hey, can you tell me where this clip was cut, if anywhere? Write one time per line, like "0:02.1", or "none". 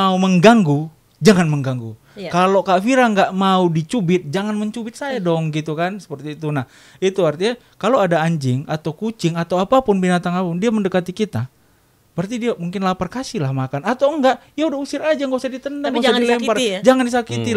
none

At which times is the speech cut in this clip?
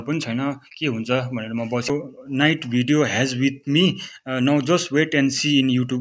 0:01.9

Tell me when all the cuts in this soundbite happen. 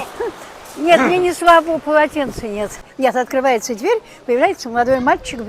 0:02.8

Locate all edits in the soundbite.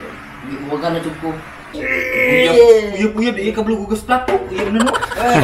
0:01.6

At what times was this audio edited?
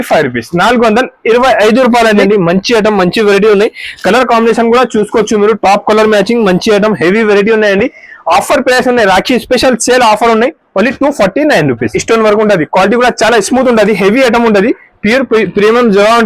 0:02.2
0:12.0

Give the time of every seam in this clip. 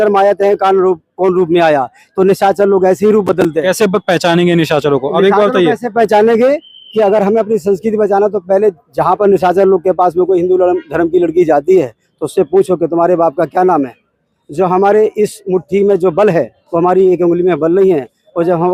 none

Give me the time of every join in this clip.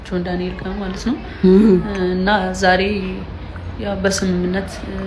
none

